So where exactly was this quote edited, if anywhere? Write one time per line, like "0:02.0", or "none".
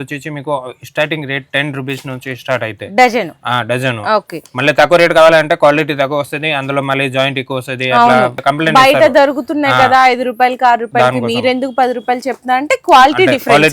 none